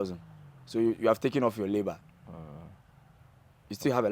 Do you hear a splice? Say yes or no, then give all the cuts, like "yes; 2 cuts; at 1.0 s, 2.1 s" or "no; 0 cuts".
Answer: no; 0 cuts